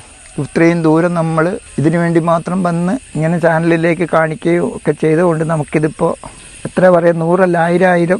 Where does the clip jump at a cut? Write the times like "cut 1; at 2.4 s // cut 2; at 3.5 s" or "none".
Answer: cut 1; at 1.7 s // cut 2; at 3.1 s // cut 3; at 6.7 s